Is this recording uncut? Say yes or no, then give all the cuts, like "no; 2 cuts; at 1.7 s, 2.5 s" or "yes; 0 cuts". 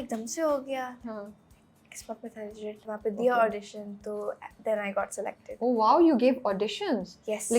yes; 0 cuts